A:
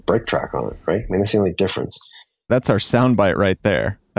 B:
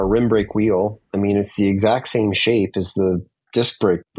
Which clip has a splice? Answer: A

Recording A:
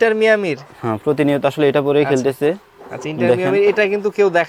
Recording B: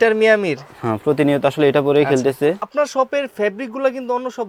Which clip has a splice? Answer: B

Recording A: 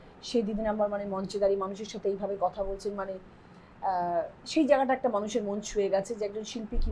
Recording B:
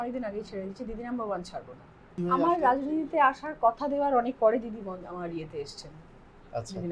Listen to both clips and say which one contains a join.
B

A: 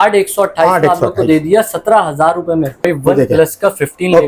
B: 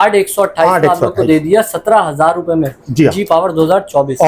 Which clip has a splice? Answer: A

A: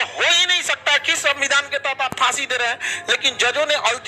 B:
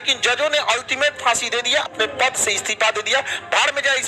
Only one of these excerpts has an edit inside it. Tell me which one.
B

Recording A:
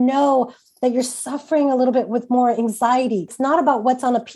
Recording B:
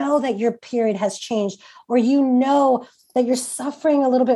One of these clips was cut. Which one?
A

